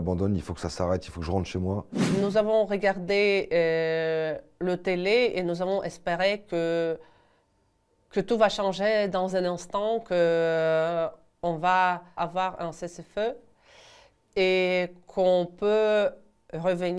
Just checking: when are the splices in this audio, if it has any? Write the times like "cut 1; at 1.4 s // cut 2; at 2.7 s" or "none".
cut 1; at 1.9 s

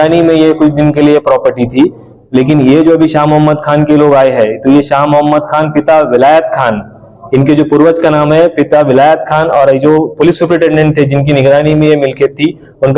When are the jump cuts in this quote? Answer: none

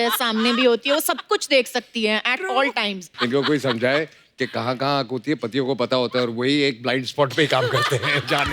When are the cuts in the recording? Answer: cut 1; at 3.1 s

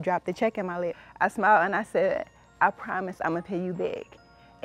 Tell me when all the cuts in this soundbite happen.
cut 1; at 1.0 s

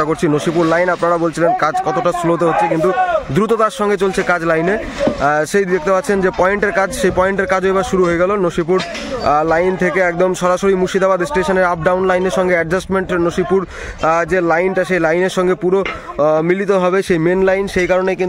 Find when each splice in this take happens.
none

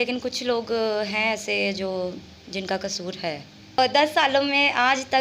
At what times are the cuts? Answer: cut 1; at 3.8 s

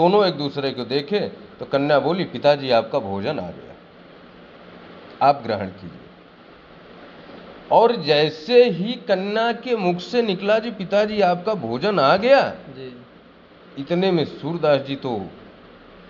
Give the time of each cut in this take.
none

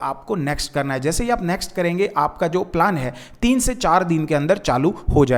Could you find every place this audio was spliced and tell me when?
none

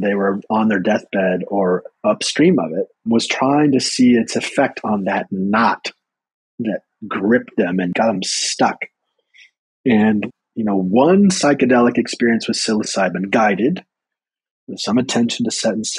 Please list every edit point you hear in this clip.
cut 1; at 3.1 s // cut 2; at 7.9 s // cut 3; at 10.3 s

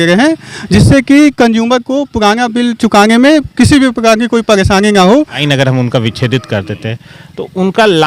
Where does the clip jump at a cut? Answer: cut 1; at 5.4 s

